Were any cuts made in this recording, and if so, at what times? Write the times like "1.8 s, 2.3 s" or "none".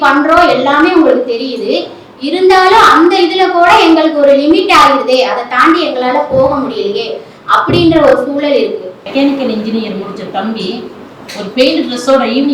9.0 s